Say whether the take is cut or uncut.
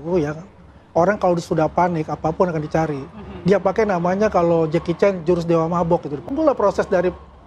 uncut